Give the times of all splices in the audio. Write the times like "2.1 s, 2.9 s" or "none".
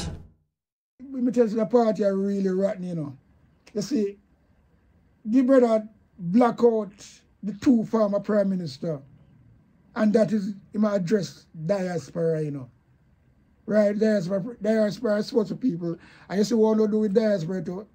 1.0 s